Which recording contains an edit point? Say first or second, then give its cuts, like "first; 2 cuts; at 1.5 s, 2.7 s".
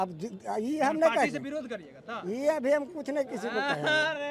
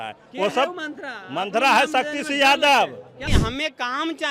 second; 1 cut; at 3.3 s